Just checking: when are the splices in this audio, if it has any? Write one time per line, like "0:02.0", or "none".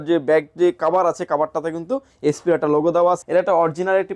0:03.2